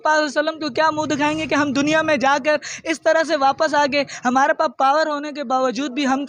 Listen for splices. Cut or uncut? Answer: uncut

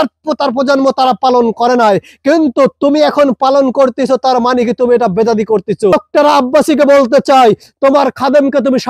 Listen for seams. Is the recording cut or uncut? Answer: cut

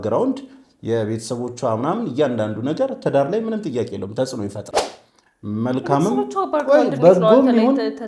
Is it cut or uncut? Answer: uncut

